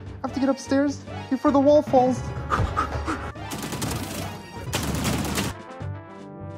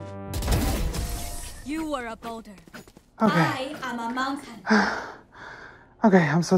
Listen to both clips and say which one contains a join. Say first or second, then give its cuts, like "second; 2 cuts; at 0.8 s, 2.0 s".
first; 3 cuts; at 3.3 s, 4.7 s, 5.5 s